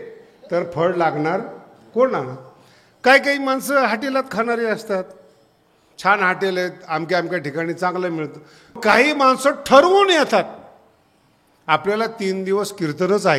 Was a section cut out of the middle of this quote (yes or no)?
yes